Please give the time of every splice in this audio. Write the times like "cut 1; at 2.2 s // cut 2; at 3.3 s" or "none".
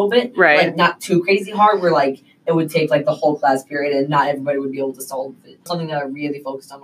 cut 1; at 5.7 s